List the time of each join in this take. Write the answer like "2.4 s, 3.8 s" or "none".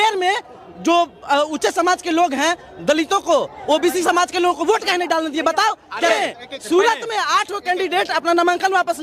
6.1 s